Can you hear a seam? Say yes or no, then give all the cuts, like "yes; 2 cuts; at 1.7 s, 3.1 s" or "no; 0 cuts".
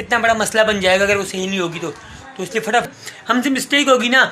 yes; 1 cut; at 2.9 s